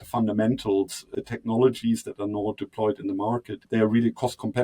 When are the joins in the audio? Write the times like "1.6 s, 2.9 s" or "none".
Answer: 1.0 s, 3.6 s